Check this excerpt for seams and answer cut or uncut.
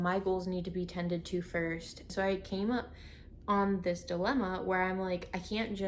cut